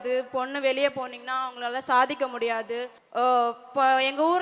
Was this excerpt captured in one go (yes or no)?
no